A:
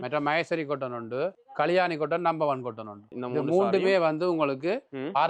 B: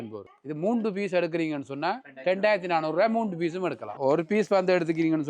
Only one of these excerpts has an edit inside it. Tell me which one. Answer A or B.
B